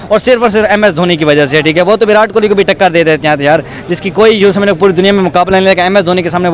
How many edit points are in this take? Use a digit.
0